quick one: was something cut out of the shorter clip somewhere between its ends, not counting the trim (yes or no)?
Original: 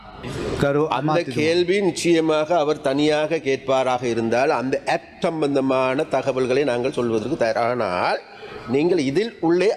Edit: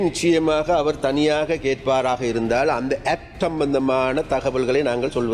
no